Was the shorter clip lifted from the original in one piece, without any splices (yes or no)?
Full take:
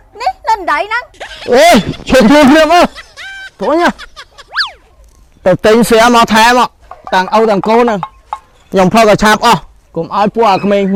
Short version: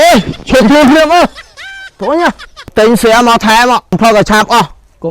no